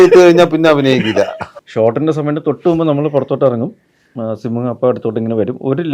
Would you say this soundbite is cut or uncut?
cut